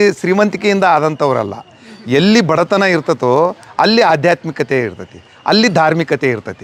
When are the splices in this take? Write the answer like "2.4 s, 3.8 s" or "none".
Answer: none